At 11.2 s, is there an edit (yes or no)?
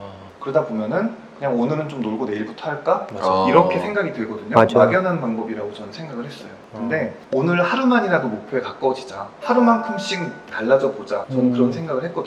yes